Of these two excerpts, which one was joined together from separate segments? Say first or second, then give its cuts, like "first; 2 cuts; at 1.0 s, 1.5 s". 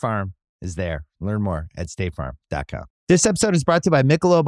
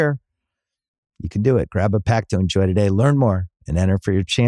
first; 1 cut; at 2.9 s